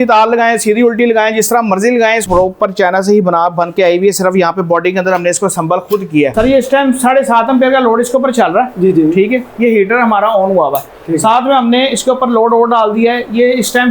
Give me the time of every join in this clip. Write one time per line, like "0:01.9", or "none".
0:02.2
0:06.3